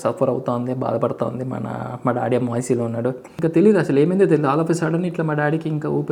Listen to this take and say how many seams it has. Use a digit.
1